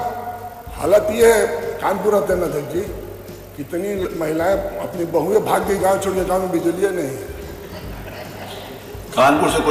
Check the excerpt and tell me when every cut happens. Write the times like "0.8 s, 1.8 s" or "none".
none